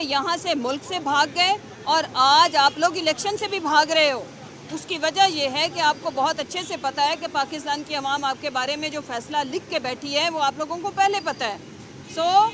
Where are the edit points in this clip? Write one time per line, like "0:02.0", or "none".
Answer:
none

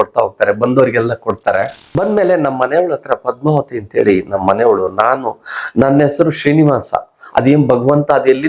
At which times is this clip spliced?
0:01.8

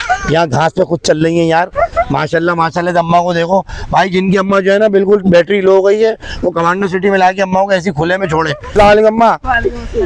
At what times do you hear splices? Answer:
0:08.7

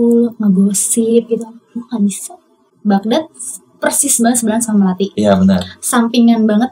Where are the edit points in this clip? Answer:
0:02.7

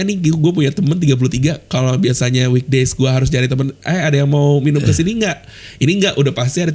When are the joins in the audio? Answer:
none

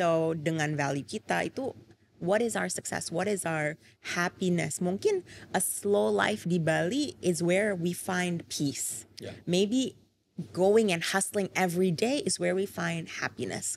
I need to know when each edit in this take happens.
none

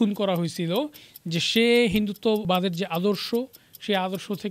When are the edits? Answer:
0:02.4

